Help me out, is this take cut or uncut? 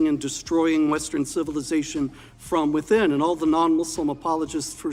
uncut